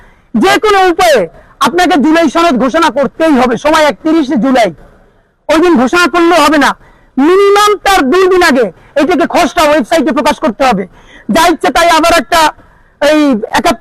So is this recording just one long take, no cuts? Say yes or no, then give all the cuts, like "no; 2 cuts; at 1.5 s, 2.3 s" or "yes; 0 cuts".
yes; 0 cuts